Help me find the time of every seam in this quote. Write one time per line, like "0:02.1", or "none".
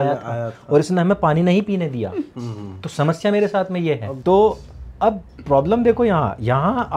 none